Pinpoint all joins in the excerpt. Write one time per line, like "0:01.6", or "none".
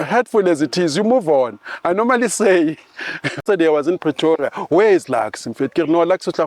0:03.4